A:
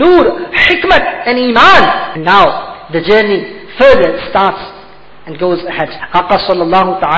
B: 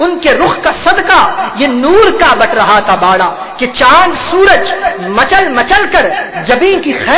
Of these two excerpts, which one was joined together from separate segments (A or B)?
A